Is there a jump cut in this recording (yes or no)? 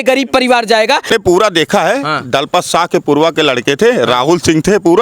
yes